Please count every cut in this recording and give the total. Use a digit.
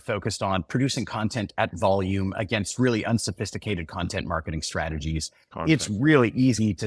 1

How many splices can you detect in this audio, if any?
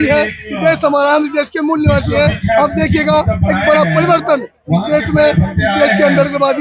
0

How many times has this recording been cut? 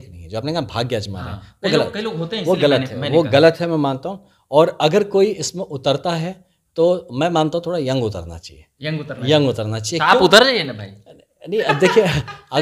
0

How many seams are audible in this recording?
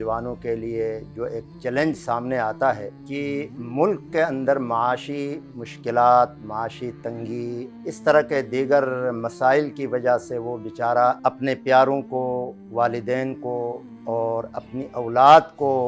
3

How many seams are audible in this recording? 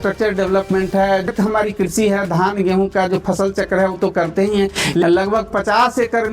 2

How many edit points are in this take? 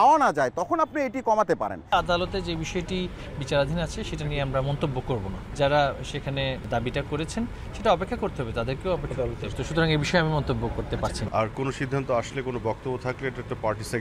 5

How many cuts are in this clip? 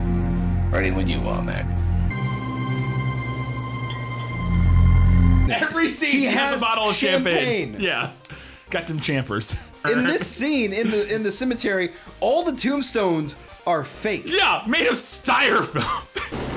1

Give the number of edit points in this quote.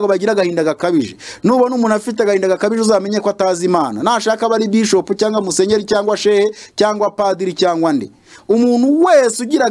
0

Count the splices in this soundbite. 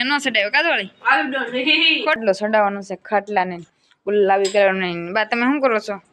1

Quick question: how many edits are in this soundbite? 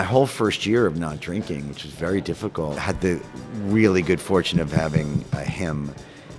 1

